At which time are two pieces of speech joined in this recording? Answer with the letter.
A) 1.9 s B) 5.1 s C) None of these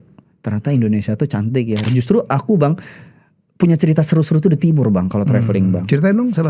A